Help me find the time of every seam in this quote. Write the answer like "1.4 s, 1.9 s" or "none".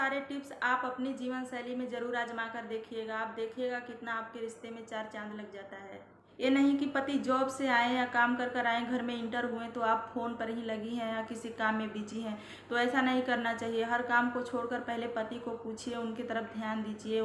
6.0 s